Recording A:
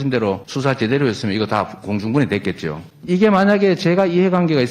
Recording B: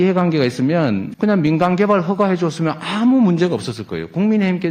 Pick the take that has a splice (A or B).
A